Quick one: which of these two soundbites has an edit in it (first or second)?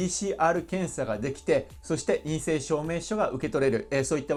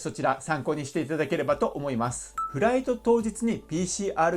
second